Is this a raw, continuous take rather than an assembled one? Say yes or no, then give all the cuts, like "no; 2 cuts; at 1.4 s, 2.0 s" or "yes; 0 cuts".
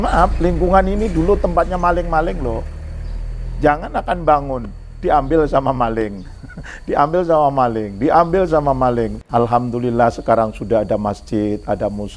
no; 1 cut; at 9.1 s